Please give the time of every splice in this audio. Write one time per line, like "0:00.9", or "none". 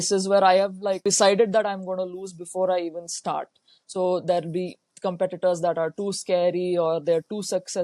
0:01.0